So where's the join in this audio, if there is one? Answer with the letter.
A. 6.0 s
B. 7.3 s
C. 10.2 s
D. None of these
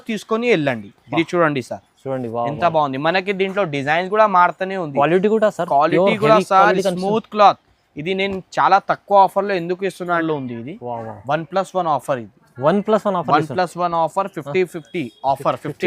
C